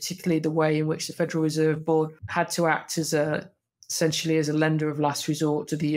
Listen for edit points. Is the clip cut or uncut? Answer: cut